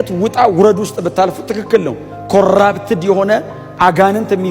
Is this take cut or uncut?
uncut